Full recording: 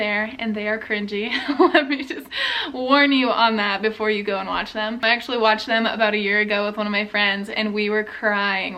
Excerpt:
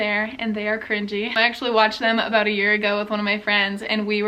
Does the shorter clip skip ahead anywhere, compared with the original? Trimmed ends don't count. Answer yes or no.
yes